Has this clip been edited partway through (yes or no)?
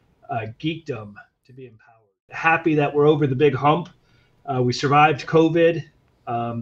yes